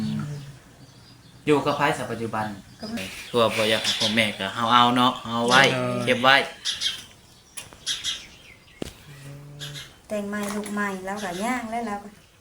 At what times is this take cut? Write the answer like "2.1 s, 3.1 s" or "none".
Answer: 3.0 s